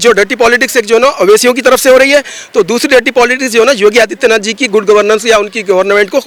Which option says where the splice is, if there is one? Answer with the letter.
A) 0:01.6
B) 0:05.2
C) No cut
C